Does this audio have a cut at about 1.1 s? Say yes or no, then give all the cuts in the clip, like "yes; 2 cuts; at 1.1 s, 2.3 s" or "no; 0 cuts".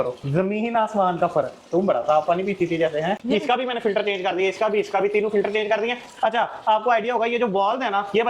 no; 1 cut; at 3.2 s